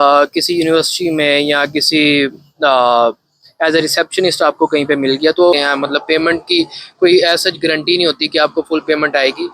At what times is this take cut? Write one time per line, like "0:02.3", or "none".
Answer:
0:05.6